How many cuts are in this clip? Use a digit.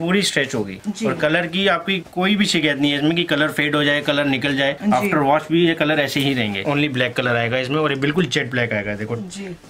1